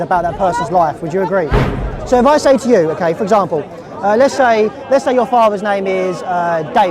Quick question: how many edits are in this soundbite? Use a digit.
1